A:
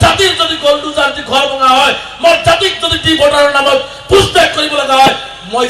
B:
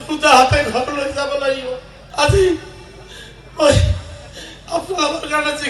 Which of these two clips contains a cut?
B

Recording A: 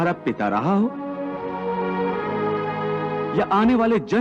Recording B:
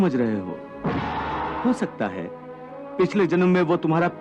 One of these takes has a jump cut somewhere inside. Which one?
B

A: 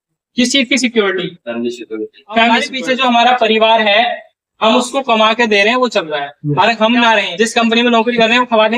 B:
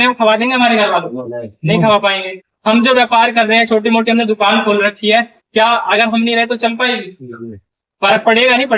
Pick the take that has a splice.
A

